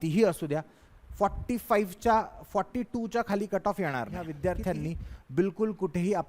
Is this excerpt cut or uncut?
cut